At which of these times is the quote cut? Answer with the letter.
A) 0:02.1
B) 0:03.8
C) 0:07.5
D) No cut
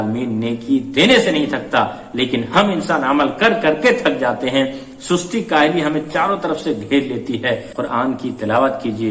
C